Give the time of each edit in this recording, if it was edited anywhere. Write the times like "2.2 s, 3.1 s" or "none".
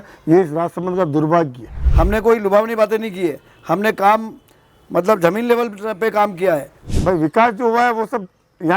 1.8 s, 6.9 s